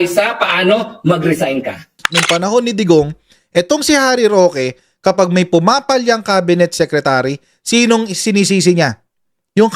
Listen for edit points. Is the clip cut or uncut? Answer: cut